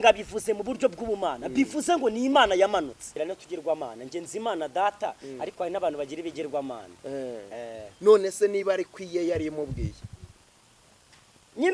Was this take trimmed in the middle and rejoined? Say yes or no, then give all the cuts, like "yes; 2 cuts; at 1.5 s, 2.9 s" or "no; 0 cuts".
yes; 1 cut; at 3.1 s